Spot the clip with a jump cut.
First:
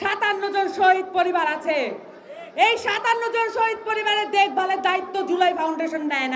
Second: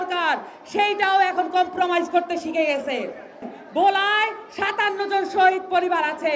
second; 1 cut; at 3.6 s

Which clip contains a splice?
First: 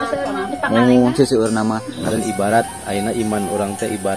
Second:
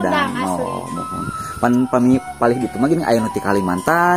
first; 1 cut; at 1.9 s

